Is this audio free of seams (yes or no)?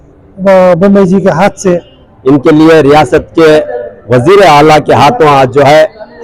no